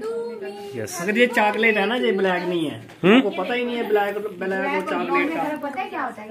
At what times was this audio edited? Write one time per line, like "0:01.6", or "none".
none